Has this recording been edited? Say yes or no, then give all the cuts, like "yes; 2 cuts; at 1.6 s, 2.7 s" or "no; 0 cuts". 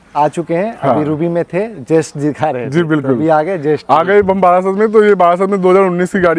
no; 0 cuts